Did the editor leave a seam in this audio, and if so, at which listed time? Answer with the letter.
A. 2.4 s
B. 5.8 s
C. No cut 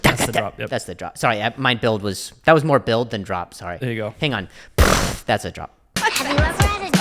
B